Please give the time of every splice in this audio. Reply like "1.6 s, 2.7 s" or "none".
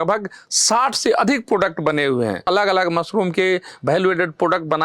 2.5 s

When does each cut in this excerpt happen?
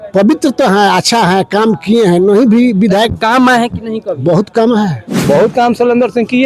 5.2 s

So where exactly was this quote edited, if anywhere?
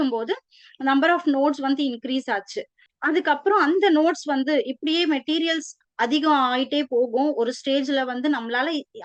none

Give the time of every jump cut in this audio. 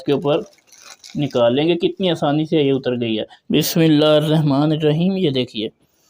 3.3 s

